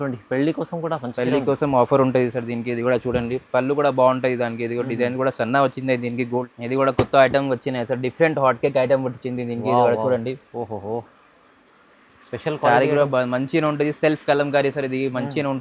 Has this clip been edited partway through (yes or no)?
yes